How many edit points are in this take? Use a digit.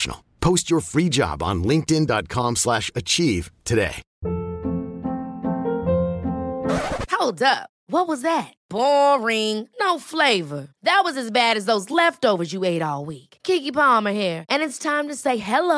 1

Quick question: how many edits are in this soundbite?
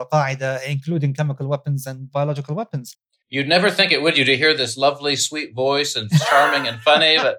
1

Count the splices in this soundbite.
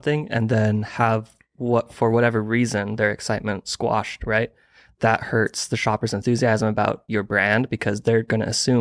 1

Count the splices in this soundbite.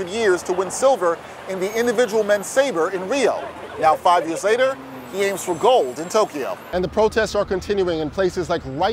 1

